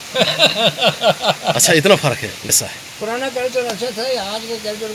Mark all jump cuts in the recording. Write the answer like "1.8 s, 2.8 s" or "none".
none